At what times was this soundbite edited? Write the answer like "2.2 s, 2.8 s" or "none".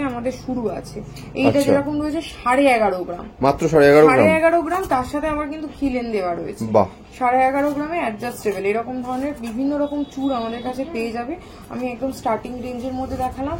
none